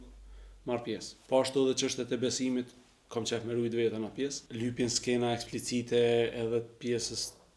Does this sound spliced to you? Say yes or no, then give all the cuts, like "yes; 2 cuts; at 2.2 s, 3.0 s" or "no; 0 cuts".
yes; 2 cuts; at 1.1 s, 4.4 s